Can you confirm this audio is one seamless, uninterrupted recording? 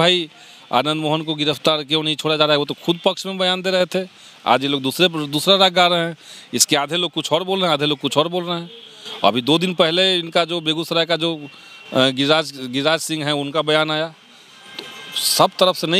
yes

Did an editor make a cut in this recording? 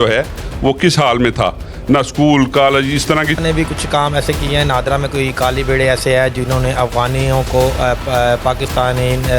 yes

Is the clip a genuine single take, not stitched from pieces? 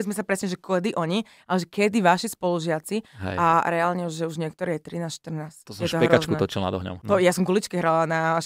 no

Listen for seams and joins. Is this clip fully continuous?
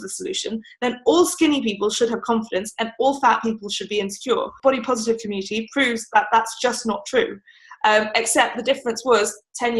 no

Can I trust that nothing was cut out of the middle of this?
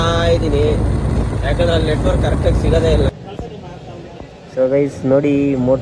no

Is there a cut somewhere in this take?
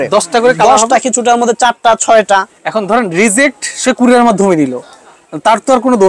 yes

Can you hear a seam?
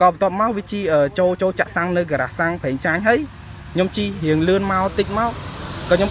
no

